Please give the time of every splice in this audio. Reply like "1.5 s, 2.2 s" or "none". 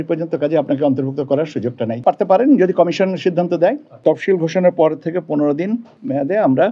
2.0 s, 3.9 s